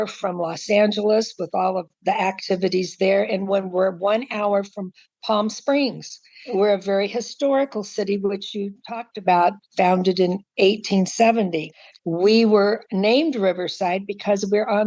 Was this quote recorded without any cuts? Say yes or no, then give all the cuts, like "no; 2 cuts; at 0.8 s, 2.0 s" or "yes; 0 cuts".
yes; 0 cuts